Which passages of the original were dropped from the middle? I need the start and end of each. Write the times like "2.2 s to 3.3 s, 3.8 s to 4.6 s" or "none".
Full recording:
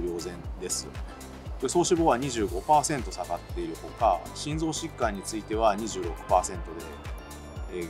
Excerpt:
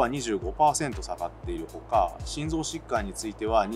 none